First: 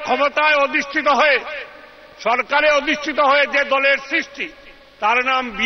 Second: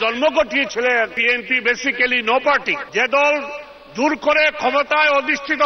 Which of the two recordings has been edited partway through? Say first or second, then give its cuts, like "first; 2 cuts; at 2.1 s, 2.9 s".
second; 2 cuts; at 1.2 s, 2.8 s